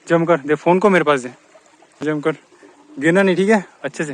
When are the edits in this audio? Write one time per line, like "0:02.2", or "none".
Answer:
0:02.0